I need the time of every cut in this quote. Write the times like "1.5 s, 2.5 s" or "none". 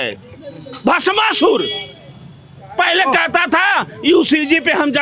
none